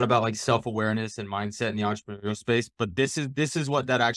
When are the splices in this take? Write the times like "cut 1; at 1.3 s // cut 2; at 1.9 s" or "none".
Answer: none